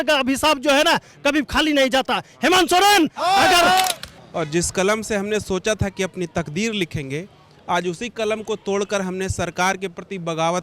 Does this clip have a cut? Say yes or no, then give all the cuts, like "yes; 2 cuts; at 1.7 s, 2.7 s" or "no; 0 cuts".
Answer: yes; 1 cut; at 3.9 s